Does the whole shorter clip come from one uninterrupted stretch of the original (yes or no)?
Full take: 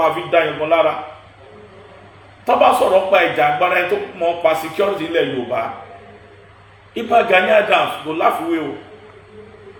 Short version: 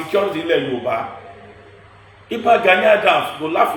yes